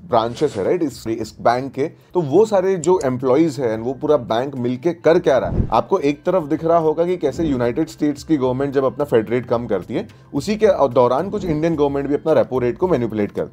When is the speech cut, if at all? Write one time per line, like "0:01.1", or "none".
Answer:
0:02.0
0:05.6